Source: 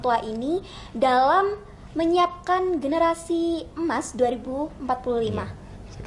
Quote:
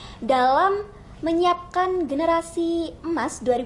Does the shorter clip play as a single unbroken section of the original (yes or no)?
yes